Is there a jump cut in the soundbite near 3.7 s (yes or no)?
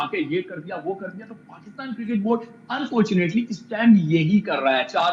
no